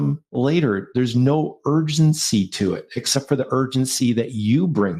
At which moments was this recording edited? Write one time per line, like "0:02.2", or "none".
none